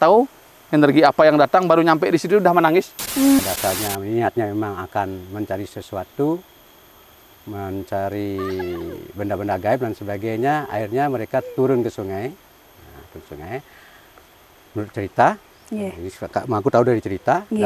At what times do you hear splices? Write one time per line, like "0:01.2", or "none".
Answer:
0:03.4